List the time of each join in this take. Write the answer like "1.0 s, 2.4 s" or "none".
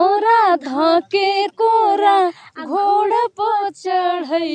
none